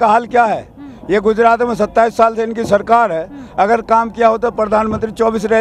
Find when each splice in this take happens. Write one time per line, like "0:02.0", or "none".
none